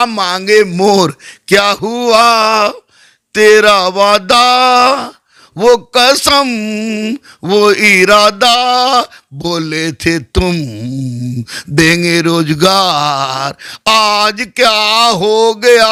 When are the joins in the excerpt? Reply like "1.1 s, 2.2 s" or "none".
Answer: none